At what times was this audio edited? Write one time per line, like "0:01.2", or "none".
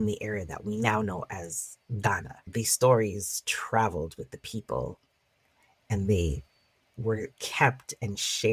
0:02.5